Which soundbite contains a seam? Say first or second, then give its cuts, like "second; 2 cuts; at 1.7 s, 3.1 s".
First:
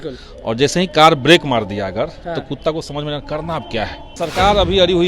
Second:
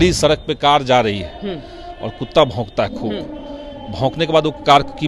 first; 1 cut; at 4.1 s